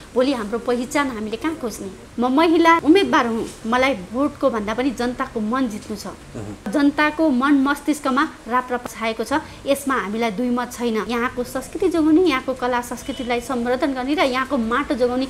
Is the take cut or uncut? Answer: cut